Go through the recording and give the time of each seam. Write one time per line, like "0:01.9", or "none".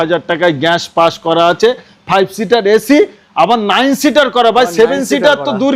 none